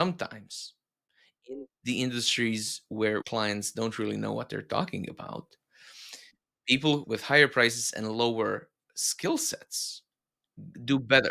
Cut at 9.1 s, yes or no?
no